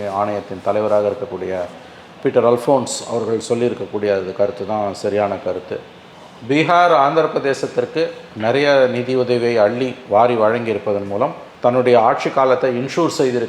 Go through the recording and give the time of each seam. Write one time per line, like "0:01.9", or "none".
none